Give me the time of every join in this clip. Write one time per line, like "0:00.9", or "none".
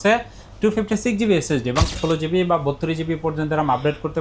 0:01.9